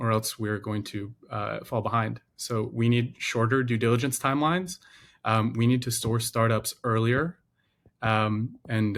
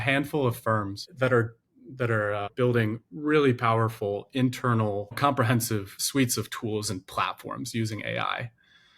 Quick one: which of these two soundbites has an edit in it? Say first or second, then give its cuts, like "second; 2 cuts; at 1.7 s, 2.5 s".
second; 4 cuts; at 1.1 s, 2.5 s, 5.2 s, 6.0 s